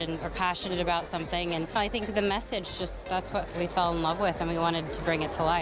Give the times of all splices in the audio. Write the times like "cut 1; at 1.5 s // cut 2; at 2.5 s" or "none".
cut 1; at 1.8 s